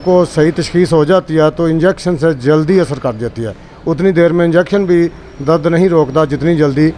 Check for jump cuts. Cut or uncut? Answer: uncut